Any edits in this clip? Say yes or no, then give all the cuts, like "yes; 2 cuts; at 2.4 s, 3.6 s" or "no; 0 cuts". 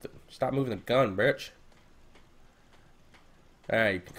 yes; 1 cut; at 2.8 s